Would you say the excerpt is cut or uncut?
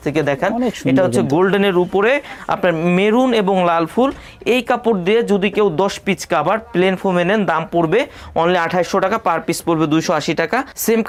uncut